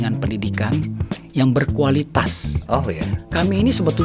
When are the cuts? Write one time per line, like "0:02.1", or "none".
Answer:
0:03.1

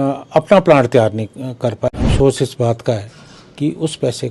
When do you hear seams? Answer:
0:01.9

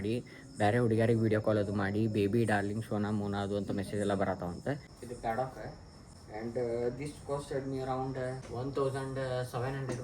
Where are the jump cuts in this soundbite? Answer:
0:05.0
0:08.5

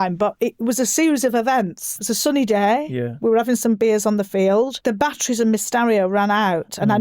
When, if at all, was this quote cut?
0:01.9
0:04.8

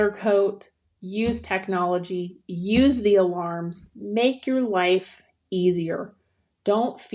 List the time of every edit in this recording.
none

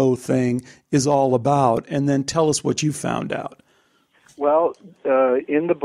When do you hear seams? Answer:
none

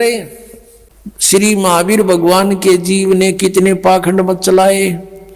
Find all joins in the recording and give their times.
0:01.3

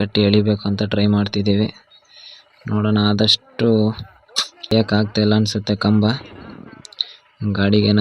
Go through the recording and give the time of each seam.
0:04.7

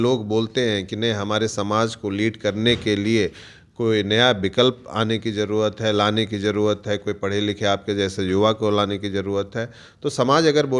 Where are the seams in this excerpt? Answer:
none

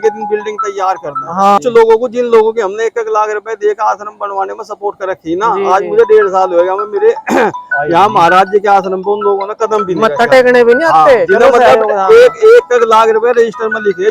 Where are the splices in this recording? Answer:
0:01.6

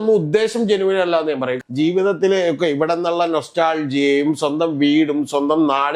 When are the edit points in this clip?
0:01.6

